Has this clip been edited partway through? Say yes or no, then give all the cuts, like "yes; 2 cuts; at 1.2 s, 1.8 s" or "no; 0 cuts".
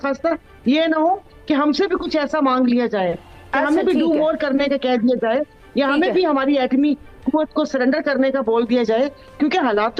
no; 0 cuts